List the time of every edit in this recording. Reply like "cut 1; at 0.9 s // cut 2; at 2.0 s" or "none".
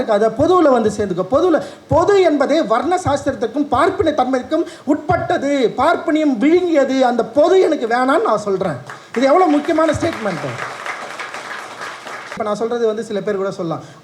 cut 1; at 12.4 s